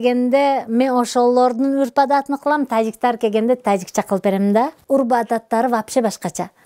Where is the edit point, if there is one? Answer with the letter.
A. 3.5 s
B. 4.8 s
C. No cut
C